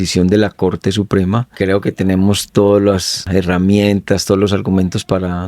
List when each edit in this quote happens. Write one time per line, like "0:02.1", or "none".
0:01.5
0:03.2